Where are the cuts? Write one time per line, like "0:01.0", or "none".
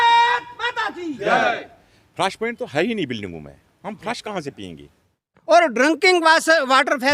0:05.3